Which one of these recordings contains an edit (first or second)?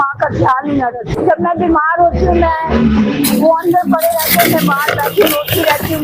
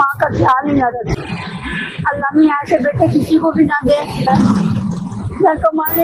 second